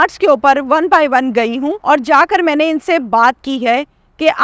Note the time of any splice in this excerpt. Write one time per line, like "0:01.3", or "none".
0:01.8